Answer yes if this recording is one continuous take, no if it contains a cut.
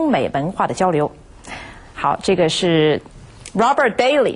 no